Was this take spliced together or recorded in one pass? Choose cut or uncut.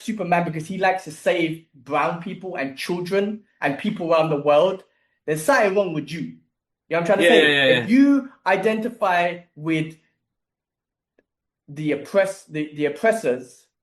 uncut